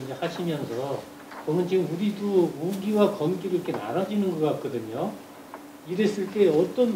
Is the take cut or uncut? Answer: uncut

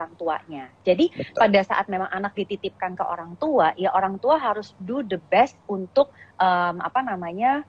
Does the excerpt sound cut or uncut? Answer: uncut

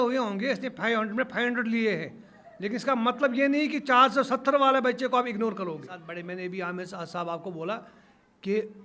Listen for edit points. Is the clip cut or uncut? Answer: cut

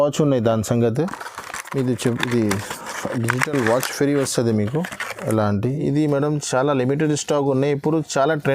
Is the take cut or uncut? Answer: cut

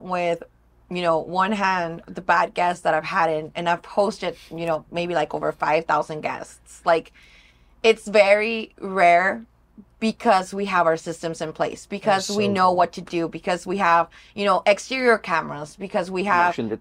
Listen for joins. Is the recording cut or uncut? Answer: uncut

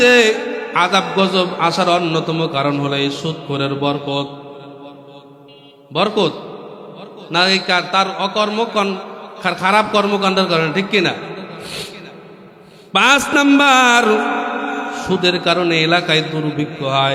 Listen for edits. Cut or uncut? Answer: uncut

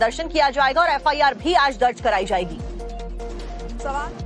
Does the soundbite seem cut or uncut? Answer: cut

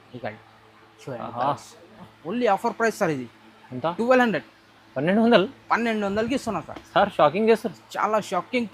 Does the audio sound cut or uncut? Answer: cut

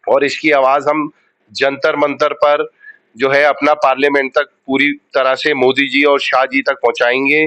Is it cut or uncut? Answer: uncut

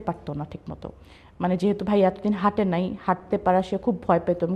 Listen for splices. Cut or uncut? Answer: uncut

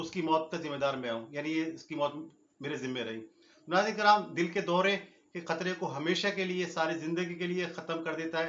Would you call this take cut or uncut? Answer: uncut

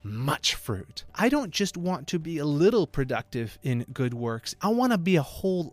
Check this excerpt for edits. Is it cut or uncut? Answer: cut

